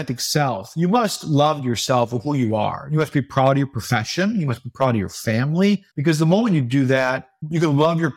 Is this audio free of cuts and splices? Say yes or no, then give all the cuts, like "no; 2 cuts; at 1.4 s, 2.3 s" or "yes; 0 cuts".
no; 1 cut; at 5.9 s